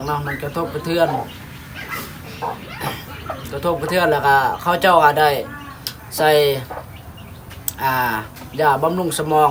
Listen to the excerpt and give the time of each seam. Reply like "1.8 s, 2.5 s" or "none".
none

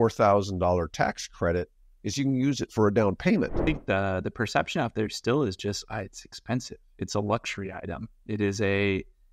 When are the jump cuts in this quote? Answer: 3.6 s

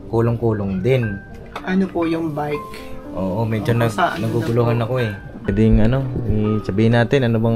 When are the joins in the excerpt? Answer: 5.5 s

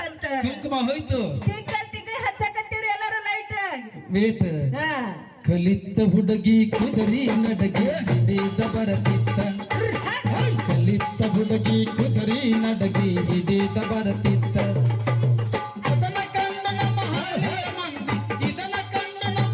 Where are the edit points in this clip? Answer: none

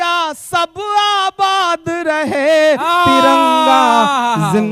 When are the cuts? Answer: none

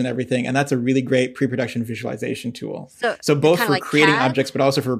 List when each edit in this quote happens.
none

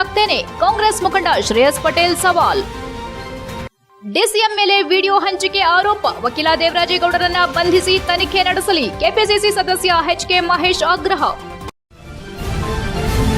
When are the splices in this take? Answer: 11.6 s

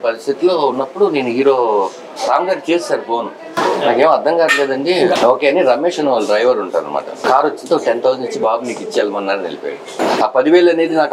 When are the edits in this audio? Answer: 5.2 s, 7.1 s, 10.1 s

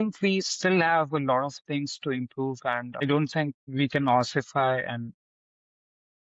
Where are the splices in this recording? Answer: 3.0 s, 3.6 s

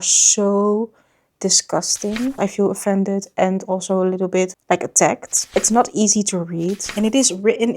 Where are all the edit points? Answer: 2.4 s, 5.4 s, 6.8 s

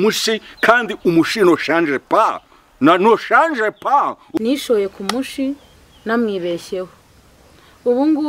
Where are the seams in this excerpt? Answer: 4.4 s

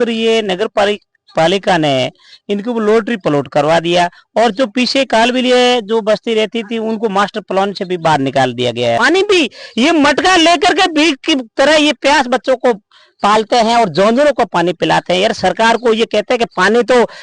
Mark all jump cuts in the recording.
9.0 s

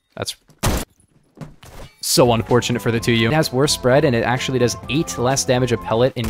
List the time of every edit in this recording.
3.3 s

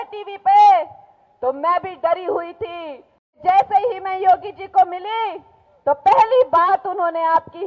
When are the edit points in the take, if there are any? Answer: 3.4 s

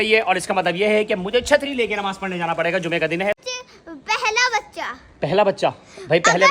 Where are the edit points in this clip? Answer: 3.4 s

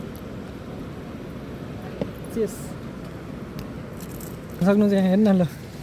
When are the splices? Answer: 4.6 s

